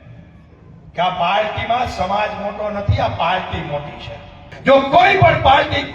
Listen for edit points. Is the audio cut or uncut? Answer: cut